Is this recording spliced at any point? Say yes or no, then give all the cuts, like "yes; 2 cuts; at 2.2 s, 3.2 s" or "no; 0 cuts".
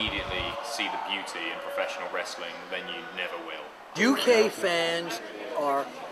yes; 1 cut; at 3.9 s